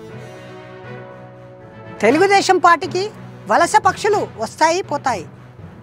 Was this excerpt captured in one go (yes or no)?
yes